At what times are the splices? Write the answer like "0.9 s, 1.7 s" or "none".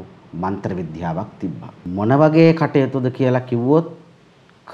1.8 s